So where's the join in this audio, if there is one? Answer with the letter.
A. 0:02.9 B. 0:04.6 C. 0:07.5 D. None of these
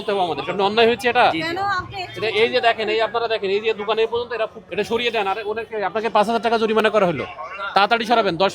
B